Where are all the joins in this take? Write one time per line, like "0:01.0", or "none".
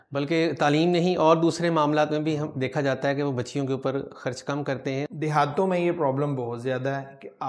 0:05.1